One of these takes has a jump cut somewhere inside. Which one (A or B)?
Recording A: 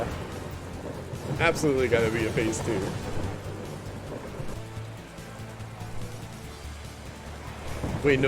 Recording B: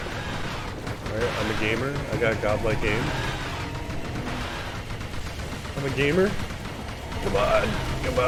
A